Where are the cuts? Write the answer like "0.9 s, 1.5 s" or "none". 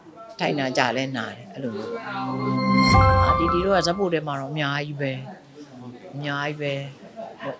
2.2 s